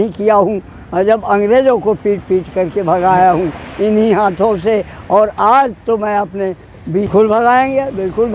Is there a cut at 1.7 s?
no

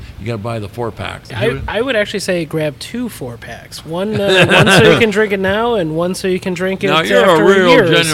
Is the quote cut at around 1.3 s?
yes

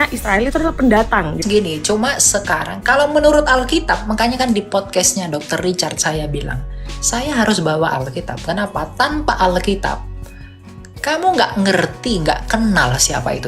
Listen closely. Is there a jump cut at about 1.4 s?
yes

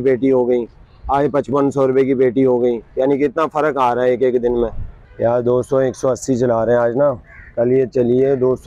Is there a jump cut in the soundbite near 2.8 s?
no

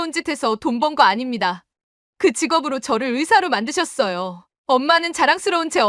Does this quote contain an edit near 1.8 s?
no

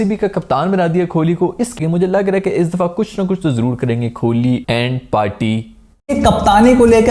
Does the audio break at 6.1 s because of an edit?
yes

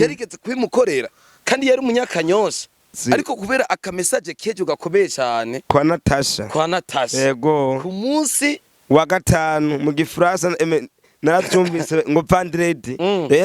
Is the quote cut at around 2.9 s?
yes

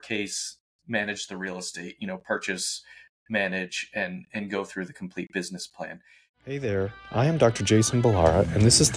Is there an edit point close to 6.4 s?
yes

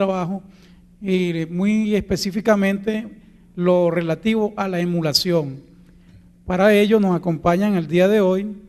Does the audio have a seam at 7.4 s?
no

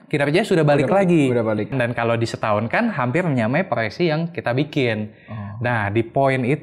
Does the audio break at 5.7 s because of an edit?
no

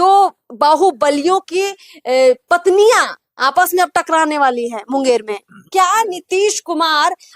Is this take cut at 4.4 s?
no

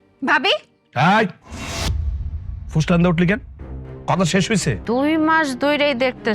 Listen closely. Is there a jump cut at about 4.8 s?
yes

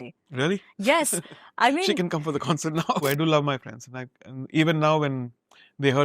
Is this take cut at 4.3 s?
no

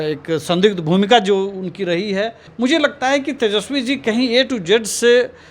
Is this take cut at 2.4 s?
yes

